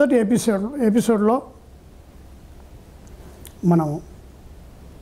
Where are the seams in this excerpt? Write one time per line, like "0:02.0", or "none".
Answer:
none